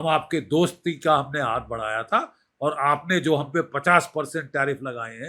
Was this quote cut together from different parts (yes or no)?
no